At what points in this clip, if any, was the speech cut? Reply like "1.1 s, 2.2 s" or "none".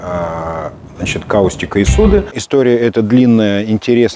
2.4 s